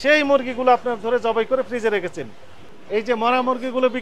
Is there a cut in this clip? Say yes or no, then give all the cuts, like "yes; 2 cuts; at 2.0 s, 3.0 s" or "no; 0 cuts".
yes; 1 cut; at 2.6 s